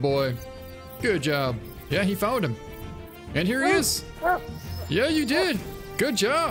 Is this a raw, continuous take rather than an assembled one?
no; 1 cut; at 1.7 s

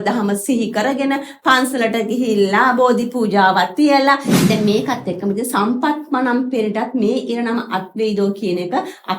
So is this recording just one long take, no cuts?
no; 1 cut; at 4.3 s

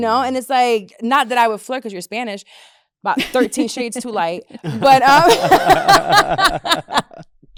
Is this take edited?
no; 0 cuts

